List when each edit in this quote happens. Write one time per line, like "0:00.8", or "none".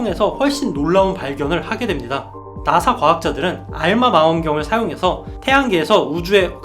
0:02.5